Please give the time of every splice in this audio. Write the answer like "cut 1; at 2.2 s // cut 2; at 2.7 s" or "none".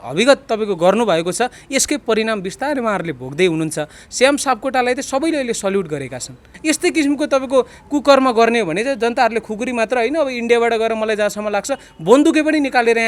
cut 1; at 6.5 s